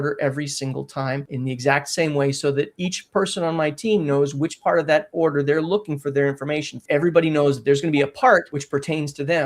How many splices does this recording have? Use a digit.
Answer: 3